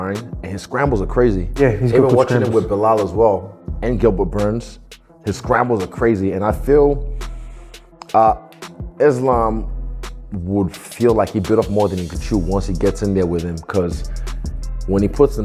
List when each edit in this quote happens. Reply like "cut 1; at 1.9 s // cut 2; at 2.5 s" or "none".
none